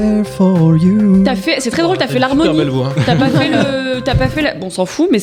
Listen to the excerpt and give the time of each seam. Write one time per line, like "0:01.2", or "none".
none